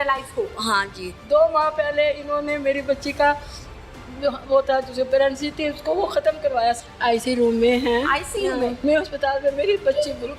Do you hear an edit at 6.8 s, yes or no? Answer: yes